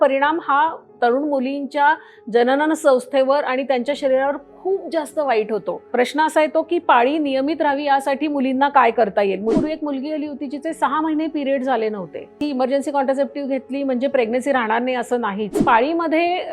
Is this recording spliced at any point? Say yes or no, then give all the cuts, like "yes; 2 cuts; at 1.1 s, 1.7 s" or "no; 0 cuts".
yes; 5 cuts; at 0.9 s, 5.9 s, 9.6 s, 12.4 s, 15.5 s